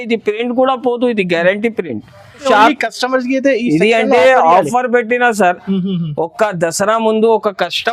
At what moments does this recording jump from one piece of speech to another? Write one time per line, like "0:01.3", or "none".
0:02.4